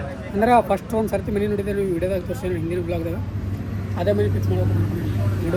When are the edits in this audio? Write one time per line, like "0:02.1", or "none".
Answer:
none